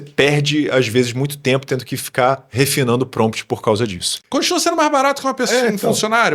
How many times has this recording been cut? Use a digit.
1